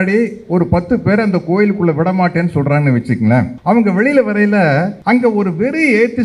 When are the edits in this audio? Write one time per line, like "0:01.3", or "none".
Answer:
0:03.5
0:05.0